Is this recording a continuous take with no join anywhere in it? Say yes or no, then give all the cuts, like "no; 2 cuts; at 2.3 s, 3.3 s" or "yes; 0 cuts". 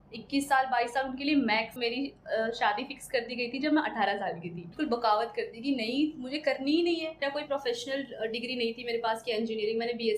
no; 3 cuts; at 1.8 s, 4.7 s, 7.2 s